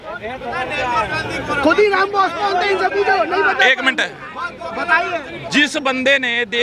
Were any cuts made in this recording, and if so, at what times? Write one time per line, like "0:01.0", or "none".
none

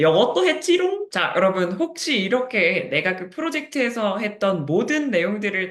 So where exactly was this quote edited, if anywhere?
0:01.1

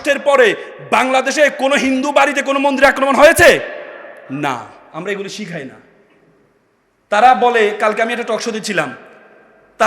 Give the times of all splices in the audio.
none

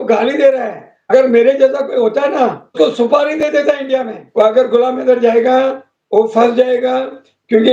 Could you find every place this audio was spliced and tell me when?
0:01.1
0:02.7
0:04.2

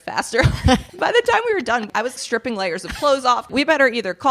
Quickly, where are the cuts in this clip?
0:00.9
0:02.1
0:03.5

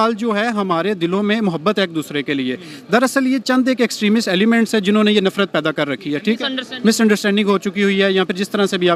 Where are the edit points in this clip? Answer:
none

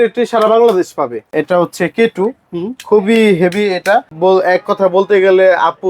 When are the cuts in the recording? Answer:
0:01.3
0:04.1

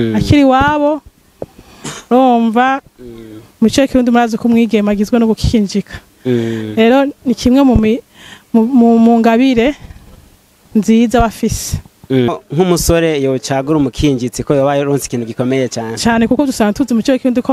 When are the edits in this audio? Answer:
0:12.3

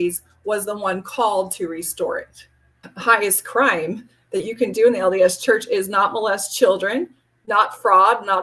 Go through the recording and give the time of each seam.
0:02.9

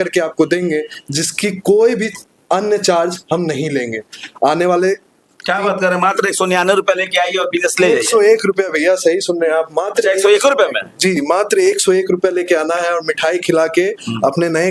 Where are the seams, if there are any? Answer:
none

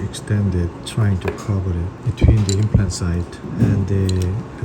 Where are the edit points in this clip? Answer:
0:00.8
0:02.0
0:03.4

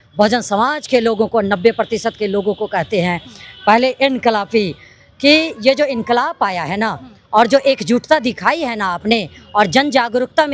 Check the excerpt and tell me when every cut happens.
none

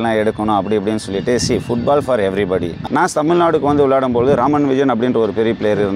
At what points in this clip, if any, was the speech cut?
0:02.8

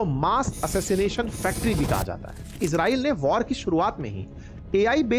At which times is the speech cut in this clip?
0:02.5

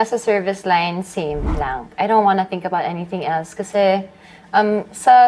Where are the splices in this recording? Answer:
none

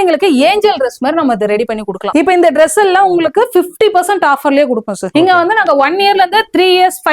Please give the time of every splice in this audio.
0:02.1
0:05.1

